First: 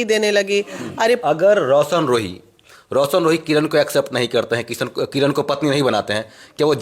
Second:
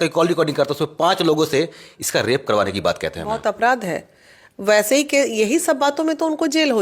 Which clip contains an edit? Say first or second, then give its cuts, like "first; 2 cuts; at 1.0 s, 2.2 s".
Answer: first; 1 cut; at 1.2 s